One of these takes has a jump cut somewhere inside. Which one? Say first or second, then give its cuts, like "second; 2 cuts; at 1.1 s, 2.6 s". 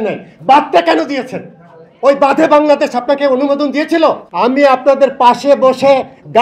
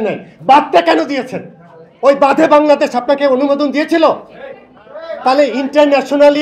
first; 1 cut; at 4.3 s